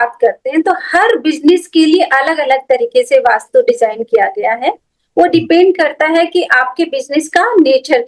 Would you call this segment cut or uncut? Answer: uncut